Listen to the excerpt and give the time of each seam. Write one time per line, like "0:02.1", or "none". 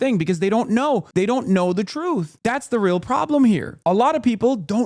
0:01.1
0:02.3
0:03.7